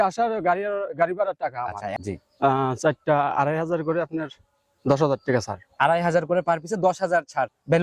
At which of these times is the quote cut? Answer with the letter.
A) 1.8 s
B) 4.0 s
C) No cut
A